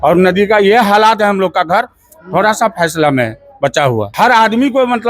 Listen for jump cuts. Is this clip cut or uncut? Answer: cut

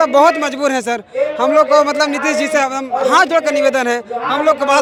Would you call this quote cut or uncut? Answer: uncut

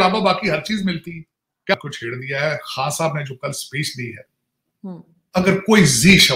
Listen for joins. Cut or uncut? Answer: uncut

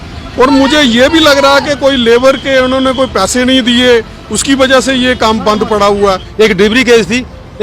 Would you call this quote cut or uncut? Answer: cut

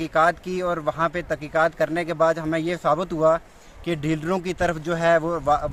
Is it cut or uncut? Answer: uncut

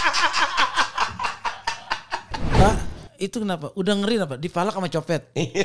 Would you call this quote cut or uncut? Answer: cut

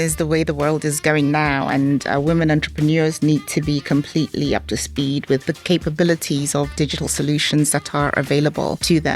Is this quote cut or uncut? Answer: uncut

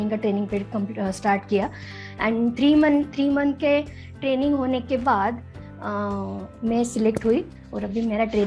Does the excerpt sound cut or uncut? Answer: cut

